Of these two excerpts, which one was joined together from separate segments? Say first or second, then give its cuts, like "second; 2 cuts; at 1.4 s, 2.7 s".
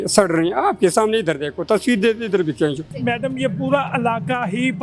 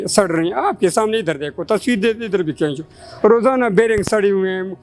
first; 1 cut; at 2.9 s